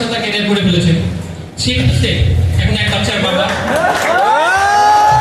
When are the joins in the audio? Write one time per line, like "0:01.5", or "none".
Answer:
none

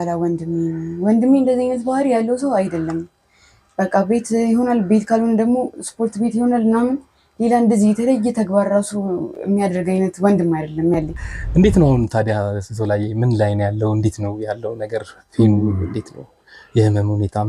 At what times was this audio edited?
0:11.2

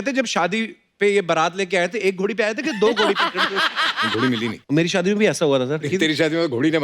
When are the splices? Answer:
0:04.3
0:05.9

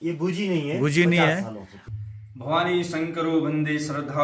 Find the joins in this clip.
0:01.8

